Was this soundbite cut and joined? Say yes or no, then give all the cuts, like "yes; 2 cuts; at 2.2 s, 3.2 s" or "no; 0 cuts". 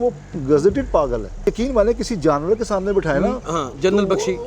yes; 1 cut; at 1.4 s